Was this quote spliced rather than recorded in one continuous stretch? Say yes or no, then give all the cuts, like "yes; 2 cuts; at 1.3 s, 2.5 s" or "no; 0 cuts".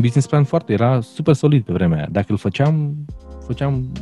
no; 0 cuts